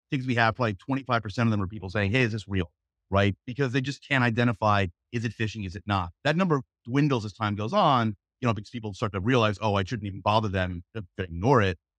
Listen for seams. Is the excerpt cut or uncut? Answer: uncut